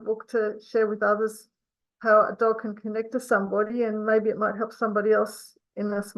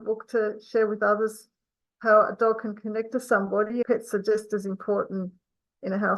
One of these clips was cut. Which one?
second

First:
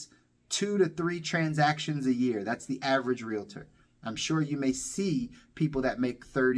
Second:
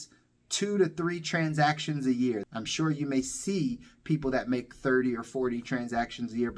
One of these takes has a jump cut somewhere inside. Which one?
second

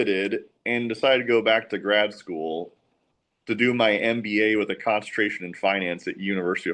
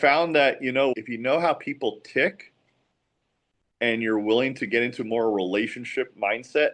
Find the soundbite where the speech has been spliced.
second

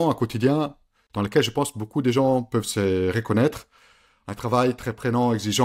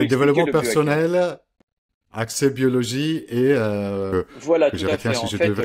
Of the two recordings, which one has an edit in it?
second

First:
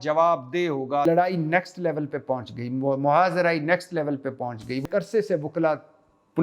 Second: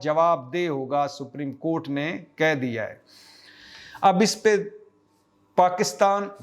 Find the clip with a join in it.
first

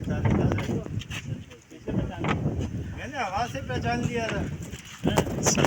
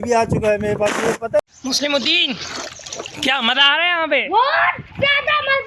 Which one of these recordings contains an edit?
second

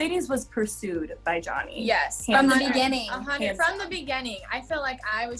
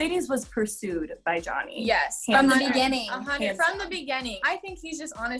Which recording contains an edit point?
second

